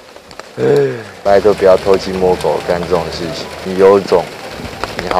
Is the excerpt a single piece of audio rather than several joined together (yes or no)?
no